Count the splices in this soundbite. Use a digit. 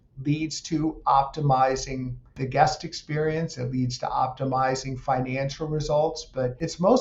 1